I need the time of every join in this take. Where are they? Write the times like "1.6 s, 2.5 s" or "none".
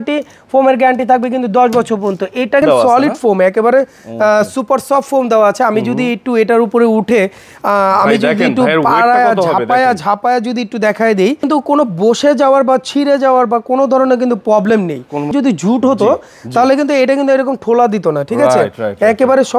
2.6 s, 11.4 s, 15.3 s